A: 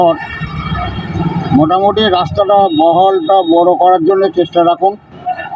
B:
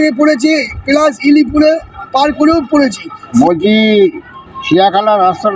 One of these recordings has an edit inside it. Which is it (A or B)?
B